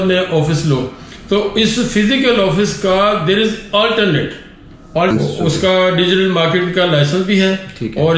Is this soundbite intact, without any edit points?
no; 1 cut; at 5.1 s

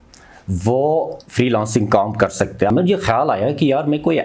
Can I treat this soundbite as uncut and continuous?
no; 1 cut; at 2.7 s

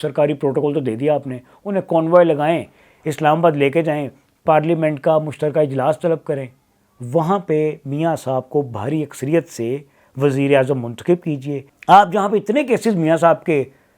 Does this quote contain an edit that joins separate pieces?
yes; 1 cut; at 11.6 s

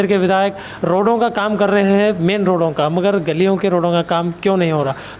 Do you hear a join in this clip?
no; 0 cuts

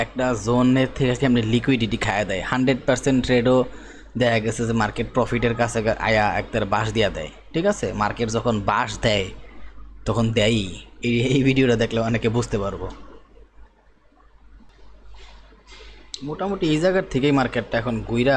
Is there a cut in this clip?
no; 0 cuts

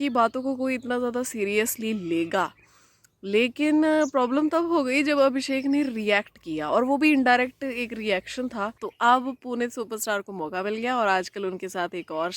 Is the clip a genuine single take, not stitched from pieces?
no; 1 cut; at 8.8 s

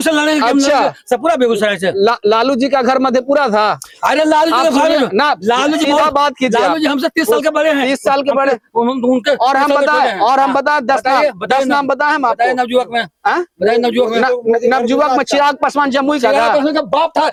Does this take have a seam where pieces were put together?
no; 0 cuts

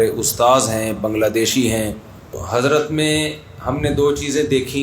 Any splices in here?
yes; 1 cut; at 2.4 s

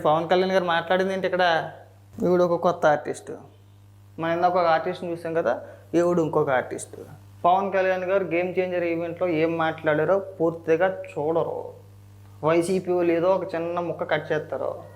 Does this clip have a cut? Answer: yes; 1 cut; at 2.1 s

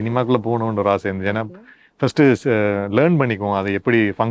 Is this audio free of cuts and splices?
yes; 0 cuts

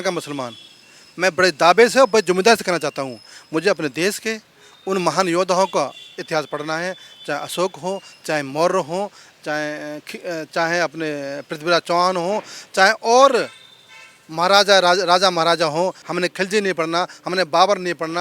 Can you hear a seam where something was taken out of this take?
yes; 1 cut; at 16.0 s

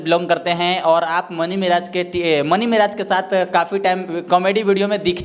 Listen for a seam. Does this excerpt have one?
no; 0 cuts

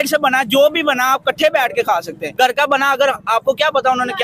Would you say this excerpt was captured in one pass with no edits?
no; 1 cut; at 2.2 s

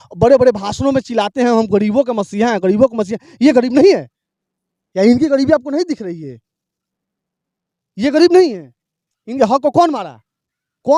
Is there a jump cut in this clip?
no; 0 cuts

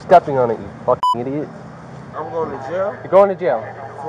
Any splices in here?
yes; 1 cut; at 2.1 s

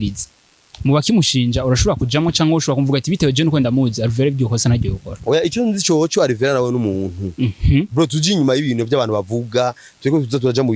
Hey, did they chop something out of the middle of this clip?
no; 0 cuts

